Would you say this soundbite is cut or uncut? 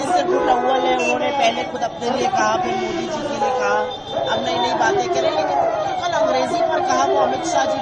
uncut